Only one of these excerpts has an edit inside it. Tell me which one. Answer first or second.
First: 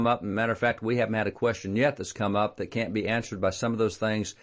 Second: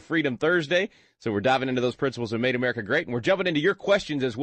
first